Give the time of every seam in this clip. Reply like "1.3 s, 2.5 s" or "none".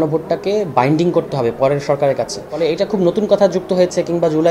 2.6 s